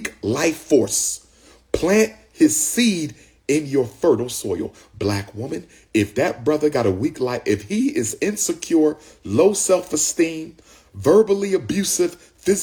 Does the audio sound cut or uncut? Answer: uncut